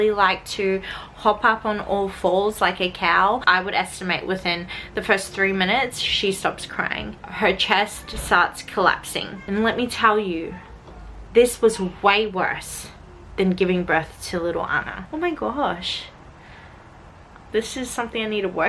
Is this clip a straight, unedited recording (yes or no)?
no